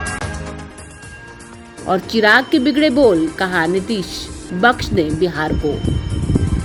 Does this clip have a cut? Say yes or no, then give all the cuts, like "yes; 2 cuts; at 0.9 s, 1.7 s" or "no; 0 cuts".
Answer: no; 0 cuts